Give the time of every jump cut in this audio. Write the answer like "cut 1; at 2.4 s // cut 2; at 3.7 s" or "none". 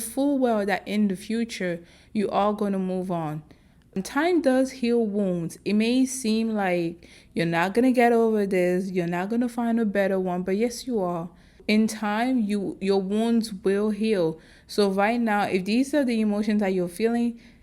cut 1; at 4.0 s // cut 2; at 11.6 s